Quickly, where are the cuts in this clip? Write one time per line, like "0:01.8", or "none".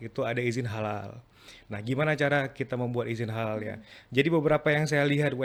none